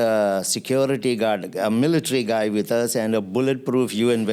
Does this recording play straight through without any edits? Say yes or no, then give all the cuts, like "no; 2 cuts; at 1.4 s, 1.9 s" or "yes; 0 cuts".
yes; 0 cuts